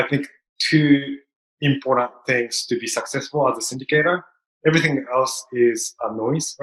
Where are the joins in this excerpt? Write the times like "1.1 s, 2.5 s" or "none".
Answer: none